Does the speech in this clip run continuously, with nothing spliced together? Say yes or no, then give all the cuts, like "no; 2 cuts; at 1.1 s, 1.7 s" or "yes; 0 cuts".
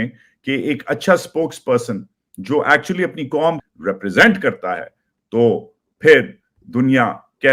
no; 1 cut; at 3.6 s